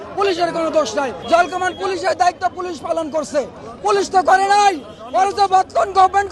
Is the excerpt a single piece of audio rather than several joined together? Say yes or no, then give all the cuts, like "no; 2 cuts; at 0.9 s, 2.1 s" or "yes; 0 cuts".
no; 1 cut; at 1.2 s